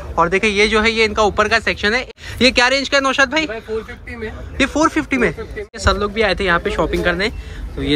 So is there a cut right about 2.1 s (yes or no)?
yes